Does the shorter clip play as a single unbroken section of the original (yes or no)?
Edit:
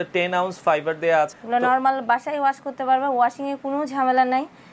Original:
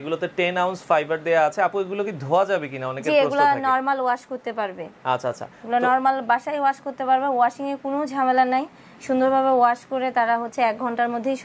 no